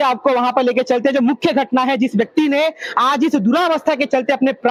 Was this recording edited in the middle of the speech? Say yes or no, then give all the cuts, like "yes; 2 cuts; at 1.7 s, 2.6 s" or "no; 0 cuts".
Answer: no; 0 cuts